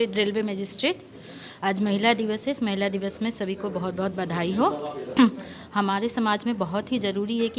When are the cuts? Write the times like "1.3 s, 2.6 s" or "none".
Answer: none